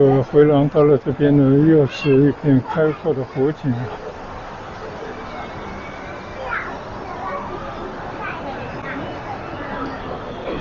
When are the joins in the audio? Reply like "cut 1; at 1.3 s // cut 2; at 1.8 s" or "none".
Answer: none